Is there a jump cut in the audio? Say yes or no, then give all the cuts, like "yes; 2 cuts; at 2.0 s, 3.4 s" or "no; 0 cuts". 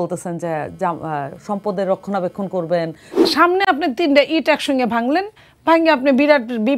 yes; 1 cut; at 3.3 s